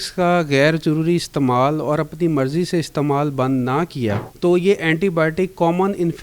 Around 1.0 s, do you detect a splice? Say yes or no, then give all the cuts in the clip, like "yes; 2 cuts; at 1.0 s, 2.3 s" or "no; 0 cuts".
no; 1 cut; at 4.3 s